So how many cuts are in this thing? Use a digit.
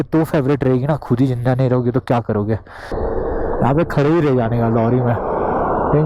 1